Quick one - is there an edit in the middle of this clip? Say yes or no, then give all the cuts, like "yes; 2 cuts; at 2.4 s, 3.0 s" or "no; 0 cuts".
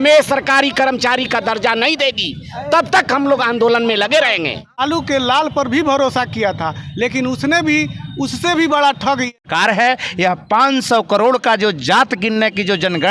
yes; 2 cuts; at 4.8 s, 9.3 s